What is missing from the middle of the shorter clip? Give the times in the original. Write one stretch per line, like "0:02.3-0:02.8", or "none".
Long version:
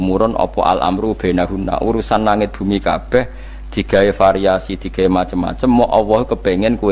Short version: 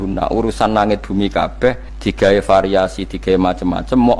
0:03.4-0:03.6